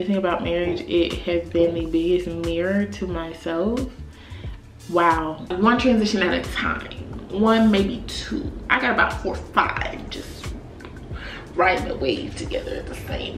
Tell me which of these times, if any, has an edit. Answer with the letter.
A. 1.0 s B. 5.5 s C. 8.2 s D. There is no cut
B